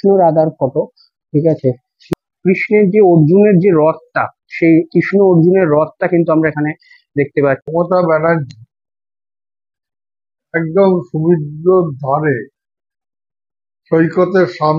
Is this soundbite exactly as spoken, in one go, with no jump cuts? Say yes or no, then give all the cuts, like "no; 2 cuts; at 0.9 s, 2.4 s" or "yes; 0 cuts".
no; 2 cuts; at 2.0 s, 7.6 s